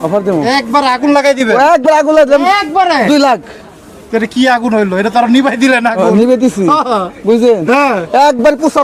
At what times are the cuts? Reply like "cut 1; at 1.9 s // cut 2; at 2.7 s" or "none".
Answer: none